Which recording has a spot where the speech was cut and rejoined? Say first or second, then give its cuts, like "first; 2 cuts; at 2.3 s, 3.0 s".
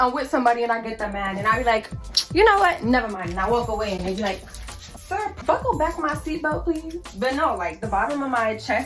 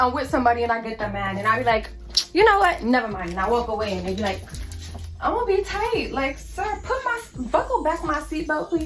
first; 2 cuts; at 5.1 s, 7.1 s